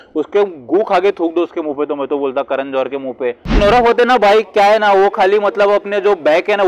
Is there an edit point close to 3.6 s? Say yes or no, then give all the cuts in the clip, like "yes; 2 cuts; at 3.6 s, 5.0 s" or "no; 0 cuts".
yes; 1 cut; at 3.6 s